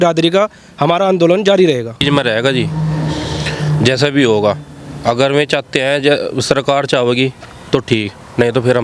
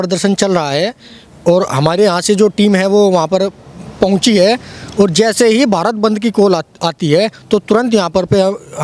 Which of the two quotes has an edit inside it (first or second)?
first